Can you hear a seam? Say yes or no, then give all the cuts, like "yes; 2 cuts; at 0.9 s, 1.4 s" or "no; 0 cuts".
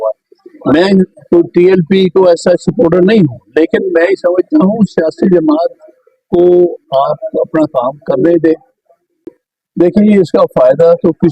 yes; 1 cut; at 9.2 s